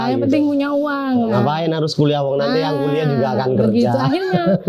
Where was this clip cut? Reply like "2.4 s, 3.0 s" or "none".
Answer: none